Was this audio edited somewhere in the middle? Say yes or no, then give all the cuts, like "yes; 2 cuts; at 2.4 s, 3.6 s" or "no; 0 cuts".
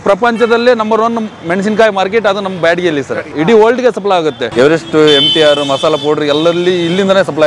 yes; 2 cuts; at 3.2 s, 4.4 s